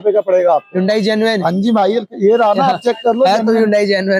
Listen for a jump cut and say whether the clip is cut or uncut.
uncut